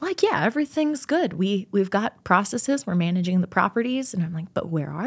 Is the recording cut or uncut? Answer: uncut